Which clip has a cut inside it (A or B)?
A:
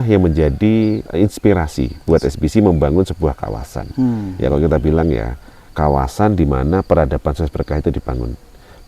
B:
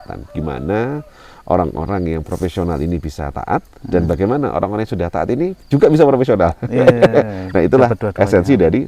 A